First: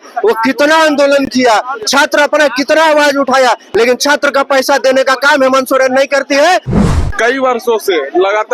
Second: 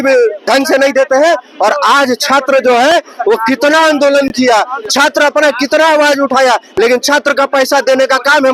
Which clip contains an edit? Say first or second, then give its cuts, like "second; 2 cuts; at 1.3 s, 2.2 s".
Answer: first; 1 cut; at 6.7 s